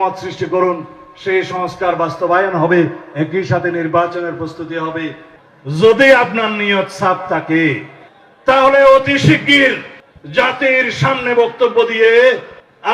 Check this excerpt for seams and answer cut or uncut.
cut